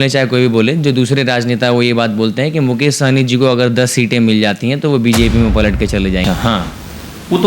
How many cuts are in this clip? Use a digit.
1